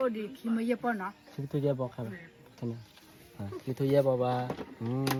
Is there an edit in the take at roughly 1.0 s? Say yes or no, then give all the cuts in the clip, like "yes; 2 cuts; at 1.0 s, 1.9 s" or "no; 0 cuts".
no; 0 cuts